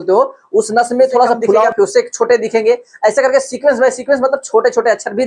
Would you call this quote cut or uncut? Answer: cut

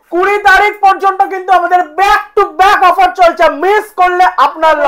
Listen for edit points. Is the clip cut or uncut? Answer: uncut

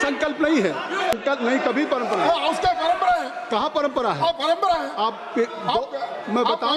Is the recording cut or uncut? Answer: cut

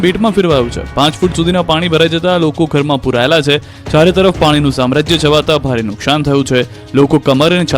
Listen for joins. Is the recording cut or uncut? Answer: cut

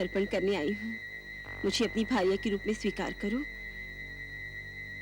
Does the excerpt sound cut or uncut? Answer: uncut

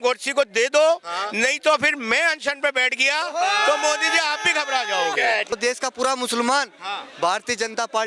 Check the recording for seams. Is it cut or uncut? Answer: cut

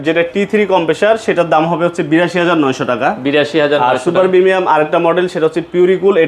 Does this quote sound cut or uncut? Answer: uncut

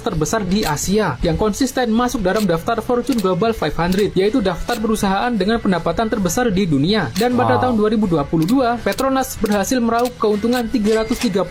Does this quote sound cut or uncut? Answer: uncut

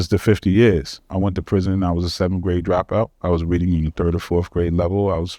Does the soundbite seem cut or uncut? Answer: cut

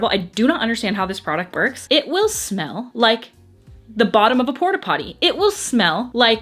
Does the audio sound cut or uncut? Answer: cut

